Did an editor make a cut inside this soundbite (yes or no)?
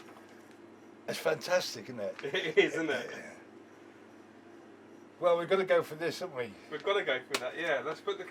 no